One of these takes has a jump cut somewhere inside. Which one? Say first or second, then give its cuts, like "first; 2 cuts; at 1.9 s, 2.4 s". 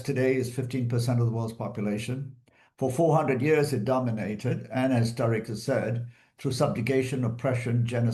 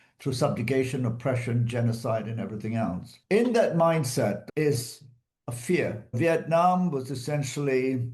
second; 2 cuts; at 3.1 s, 6.0 s